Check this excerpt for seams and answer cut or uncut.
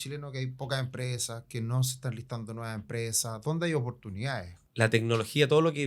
cut